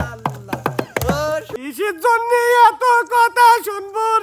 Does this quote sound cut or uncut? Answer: cut